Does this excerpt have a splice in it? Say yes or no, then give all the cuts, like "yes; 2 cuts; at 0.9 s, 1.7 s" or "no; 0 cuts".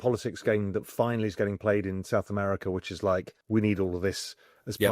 yes; 1 cut; at 3.3 s